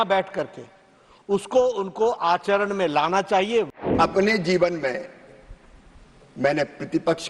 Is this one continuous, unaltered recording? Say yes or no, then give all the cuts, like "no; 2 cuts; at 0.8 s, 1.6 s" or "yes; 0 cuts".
no; 1 cut; at 3.8 s